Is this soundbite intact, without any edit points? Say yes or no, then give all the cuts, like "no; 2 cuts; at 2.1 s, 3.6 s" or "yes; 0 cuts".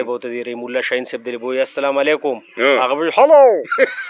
yes; 0 cuts